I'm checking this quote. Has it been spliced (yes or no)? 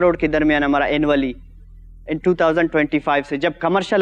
no